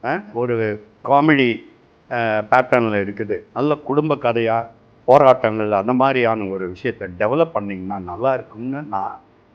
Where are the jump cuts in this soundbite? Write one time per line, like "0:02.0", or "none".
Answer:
0:03.4